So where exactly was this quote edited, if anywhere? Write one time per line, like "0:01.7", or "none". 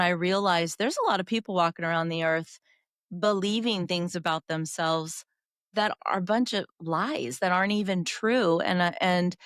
none